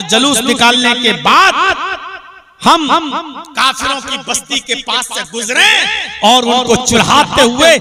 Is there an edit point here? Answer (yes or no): no